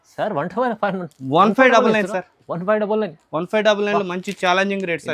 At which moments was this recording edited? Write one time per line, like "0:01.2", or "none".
none